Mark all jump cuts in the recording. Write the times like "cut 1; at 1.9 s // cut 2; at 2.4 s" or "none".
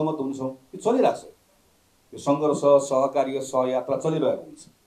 none